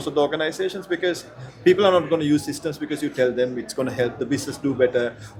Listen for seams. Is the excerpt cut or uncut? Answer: uncut